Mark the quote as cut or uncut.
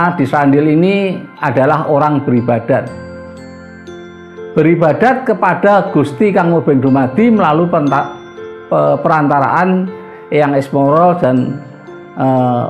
uncut